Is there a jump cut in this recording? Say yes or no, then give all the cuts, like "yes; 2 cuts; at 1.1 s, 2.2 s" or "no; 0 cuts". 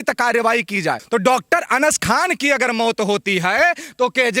yes; 1 cut; at 1.0 s